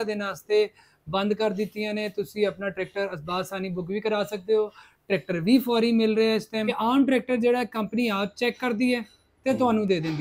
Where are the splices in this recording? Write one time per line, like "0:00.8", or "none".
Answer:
0:06.6